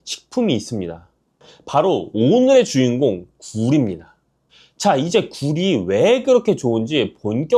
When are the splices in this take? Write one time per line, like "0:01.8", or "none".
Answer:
none